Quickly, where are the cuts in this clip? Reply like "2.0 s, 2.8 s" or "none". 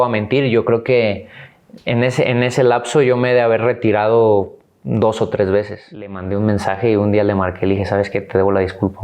6.2 s